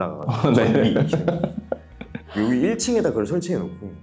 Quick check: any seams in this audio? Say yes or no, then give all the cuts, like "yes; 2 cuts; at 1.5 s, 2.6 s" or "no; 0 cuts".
no; 0 cuts